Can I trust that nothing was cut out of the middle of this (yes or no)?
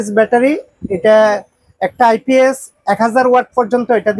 yes